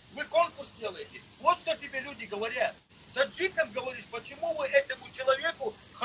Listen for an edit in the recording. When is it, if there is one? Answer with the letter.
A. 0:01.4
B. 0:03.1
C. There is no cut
B